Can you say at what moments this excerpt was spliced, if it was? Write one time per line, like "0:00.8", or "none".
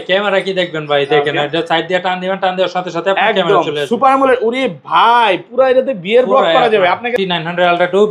0:07.1